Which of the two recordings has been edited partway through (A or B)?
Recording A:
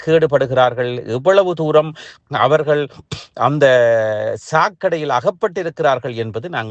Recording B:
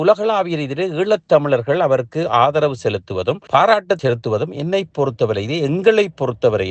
B